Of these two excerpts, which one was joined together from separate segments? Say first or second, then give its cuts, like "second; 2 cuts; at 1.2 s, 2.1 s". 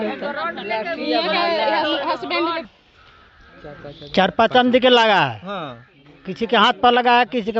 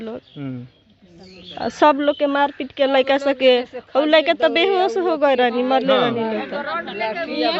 first; 1 cut; at 2.6 s